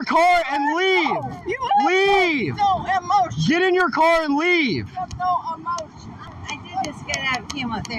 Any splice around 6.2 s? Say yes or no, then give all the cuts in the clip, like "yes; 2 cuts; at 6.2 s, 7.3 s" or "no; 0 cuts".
yes; 1 cut; at 6.2 s